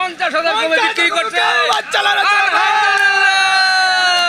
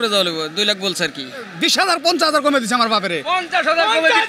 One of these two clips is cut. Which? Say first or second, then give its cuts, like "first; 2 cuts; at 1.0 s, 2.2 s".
second; 1 cut; at 1.5 s